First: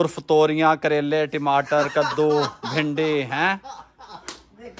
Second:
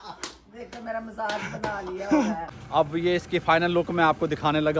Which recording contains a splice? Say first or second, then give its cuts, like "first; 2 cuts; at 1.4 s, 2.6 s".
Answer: second; 1 cut; at 2.5 s